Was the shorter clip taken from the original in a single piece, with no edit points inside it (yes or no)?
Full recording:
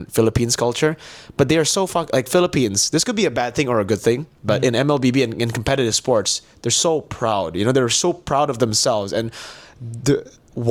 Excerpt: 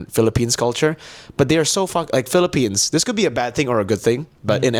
yes